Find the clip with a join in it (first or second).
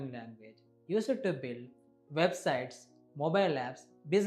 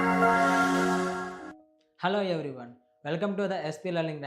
second